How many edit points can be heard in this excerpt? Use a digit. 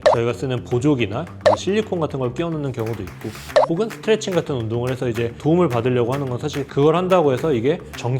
2